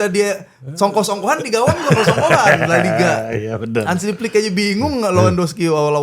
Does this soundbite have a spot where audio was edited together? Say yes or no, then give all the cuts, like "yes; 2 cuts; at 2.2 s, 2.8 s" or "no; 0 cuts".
no; 0 cuts